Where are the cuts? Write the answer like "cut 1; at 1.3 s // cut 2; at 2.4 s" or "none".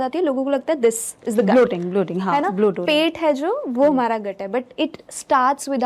none